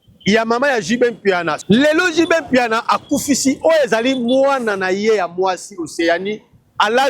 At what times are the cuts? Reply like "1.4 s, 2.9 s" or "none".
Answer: 1.6 s